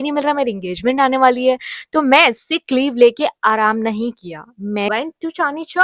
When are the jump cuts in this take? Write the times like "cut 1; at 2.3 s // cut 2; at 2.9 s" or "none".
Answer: cut 1; at 4.9 s